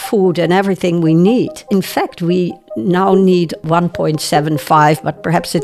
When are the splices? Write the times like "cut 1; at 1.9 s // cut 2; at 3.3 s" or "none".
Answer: cut 1; at 1.6 s // cut 2; at 3.6 s